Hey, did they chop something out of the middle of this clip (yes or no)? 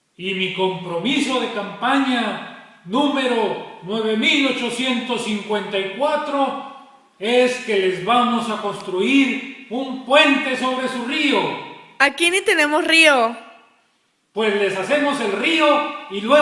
yes